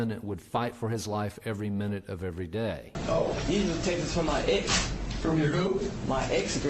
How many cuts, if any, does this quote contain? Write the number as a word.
one